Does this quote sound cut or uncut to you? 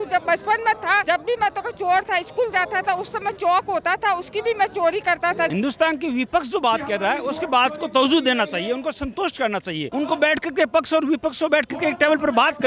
cut